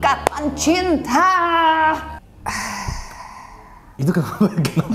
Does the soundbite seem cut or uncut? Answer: cut